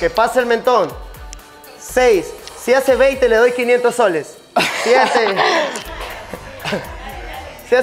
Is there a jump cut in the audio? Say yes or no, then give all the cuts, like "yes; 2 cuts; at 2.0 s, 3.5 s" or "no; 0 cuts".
no; 0 cuts